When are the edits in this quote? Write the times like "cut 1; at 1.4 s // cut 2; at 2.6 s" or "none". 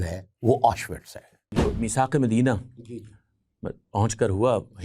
cut 1; at 1.5 s